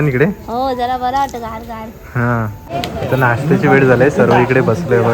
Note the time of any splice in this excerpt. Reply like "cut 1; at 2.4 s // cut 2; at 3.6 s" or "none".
cut 1; at 2.7 s